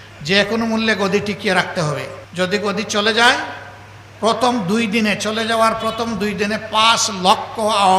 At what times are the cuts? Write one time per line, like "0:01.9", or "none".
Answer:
0:02.2